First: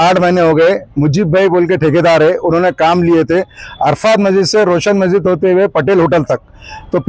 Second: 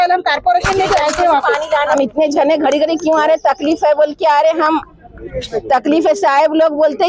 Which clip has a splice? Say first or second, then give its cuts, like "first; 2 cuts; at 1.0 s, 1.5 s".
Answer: second; 1 cut; at 2.0 s